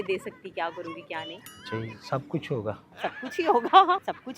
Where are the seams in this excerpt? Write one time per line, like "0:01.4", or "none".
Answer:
0:01.5
0:02.9

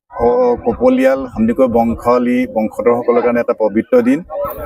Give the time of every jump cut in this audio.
none

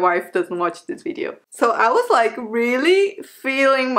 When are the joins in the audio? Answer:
0:01.4

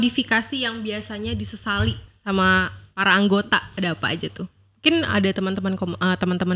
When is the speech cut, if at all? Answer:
none

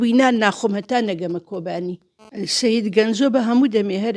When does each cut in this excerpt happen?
0:01.9

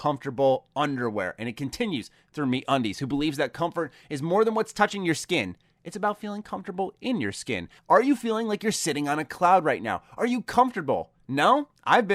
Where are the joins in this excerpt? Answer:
0:07.7

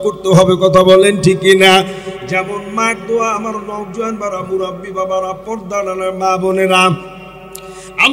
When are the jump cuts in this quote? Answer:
none

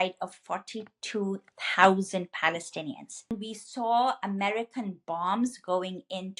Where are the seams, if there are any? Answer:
0:03.3

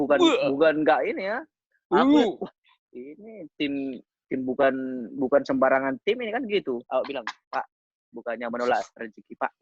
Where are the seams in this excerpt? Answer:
0:06.8

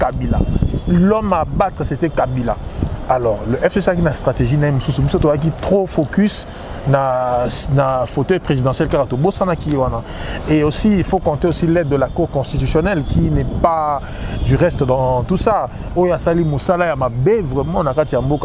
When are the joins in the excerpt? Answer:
none

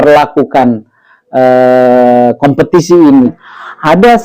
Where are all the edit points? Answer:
0:03.3

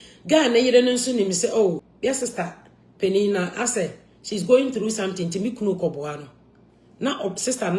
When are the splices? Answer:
0:01.9

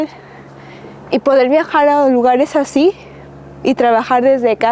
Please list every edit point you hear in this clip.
none

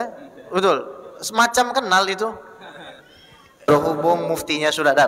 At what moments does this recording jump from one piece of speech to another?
0:03.7

